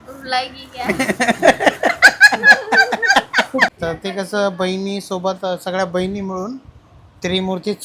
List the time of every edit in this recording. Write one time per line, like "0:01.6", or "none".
0:03.7